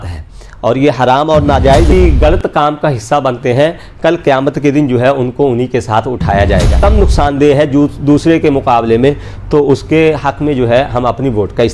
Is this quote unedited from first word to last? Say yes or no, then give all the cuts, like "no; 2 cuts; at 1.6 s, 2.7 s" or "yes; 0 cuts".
no; 2 cuts; at 1.9 s, 6.8 s